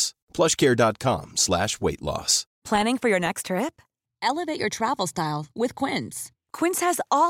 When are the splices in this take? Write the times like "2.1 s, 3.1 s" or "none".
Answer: 2.5 s